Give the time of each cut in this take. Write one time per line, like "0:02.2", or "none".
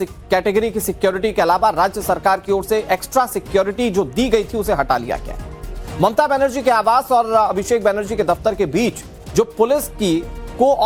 none